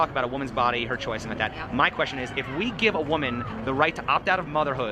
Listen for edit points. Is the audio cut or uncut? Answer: cut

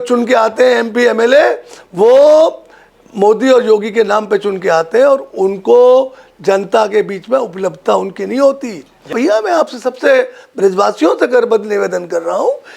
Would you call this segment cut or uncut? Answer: cut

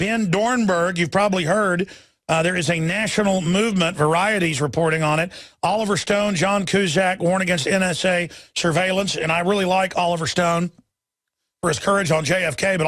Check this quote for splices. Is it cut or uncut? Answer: uncut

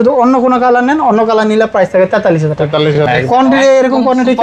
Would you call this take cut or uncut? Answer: cut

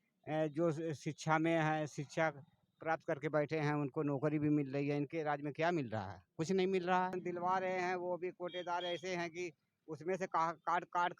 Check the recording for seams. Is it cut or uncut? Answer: cut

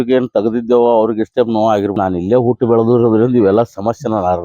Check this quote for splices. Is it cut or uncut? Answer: cut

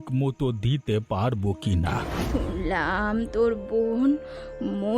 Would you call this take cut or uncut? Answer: cut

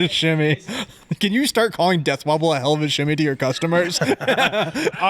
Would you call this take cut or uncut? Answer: cut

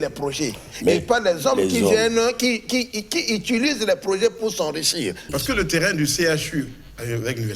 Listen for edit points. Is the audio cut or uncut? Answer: cut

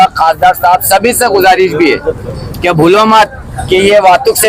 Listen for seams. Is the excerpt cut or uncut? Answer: uncut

